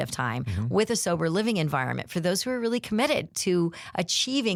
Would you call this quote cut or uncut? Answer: uncut